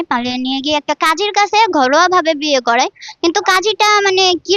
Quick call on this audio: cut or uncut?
uncut